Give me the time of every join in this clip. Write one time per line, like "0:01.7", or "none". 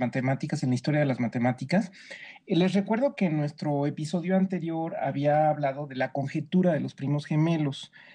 0:01.4